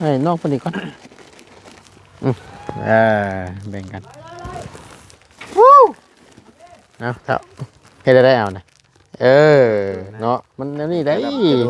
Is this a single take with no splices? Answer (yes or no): yes